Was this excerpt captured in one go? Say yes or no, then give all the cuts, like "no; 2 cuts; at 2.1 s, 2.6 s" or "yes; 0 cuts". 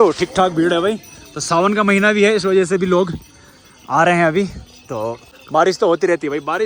yes; 0 cuts